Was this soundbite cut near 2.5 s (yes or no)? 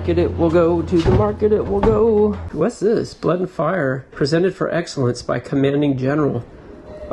yes